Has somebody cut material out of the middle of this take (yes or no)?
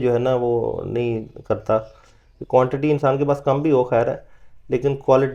no